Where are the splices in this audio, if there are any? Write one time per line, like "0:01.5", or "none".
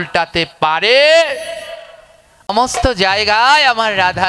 0:02.5